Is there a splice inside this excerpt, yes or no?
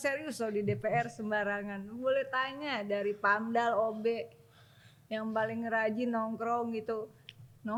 no